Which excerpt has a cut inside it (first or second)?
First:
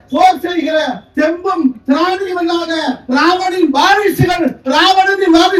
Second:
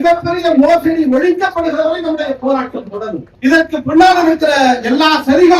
second